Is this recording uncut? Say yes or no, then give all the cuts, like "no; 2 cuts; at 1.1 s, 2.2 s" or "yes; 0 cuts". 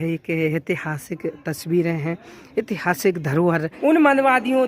no; 1 cut; at 3.7 s